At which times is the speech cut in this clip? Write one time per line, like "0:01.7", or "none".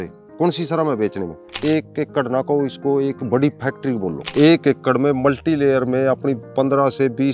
0:01.6
0:04.2